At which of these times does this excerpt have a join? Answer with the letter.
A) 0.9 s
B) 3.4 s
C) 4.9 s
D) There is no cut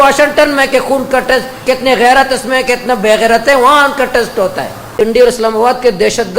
C